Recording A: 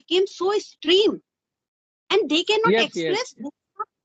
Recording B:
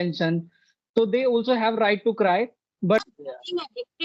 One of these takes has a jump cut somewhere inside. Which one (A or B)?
B